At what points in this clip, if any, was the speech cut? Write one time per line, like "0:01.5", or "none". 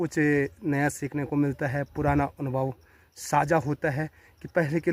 none